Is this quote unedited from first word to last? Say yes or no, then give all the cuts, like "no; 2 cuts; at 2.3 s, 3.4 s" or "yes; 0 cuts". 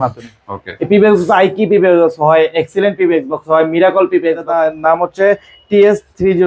no; 1 cut; at 4.5 s